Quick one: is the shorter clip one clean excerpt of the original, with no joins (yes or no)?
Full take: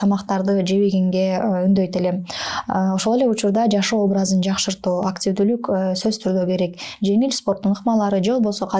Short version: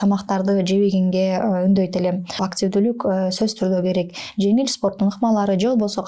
no